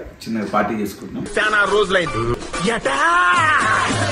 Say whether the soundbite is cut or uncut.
uncut